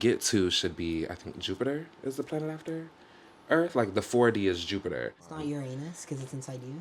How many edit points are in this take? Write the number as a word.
one